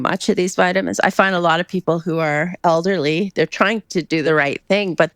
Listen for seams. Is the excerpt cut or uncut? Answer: cut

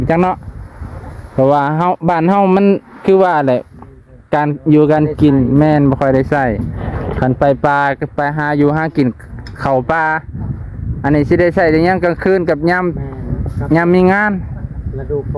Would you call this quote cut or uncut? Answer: uncut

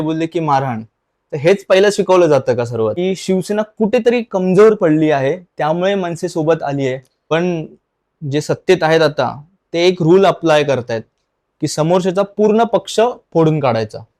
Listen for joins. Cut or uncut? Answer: cut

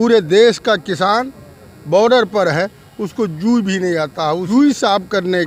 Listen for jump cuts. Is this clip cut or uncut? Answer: cut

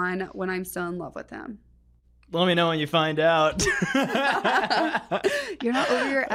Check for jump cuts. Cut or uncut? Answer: uncut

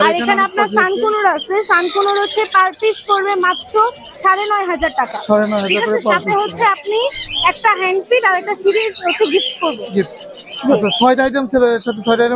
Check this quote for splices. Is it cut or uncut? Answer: uncut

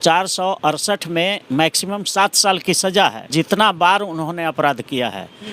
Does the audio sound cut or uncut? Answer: cut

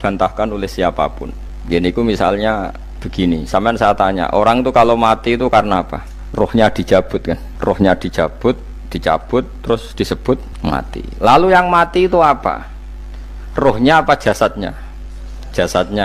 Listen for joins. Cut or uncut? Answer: uncut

